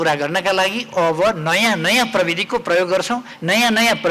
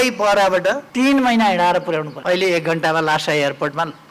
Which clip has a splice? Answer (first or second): second